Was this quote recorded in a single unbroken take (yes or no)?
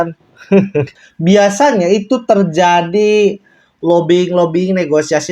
no